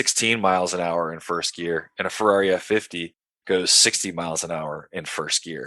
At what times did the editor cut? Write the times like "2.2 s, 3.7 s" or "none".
none